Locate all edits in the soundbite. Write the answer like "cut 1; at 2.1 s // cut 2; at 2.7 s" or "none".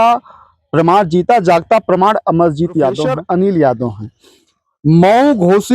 cut 1; at 3.1 s